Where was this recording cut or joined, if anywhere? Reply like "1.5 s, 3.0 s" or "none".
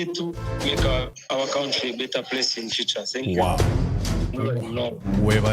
none